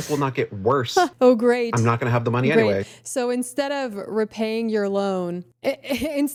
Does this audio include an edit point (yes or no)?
no